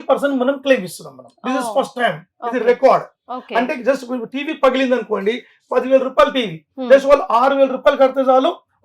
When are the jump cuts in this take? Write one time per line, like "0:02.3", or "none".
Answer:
none